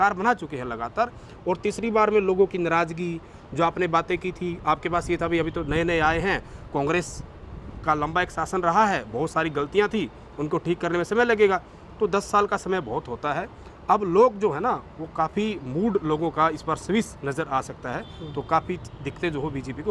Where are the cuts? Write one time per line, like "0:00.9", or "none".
none